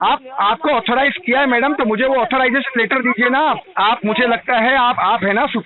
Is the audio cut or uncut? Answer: cut